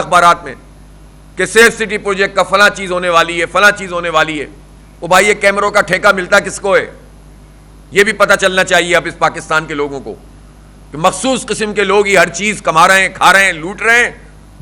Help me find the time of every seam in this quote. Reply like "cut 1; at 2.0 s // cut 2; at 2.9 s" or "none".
none